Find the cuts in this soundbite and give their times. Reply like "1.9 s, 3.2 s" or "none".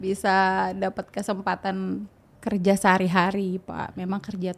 2.3 s